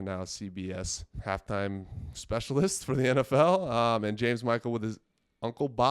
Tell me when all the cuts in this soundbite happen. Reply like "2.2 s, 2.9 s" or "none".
1.1 s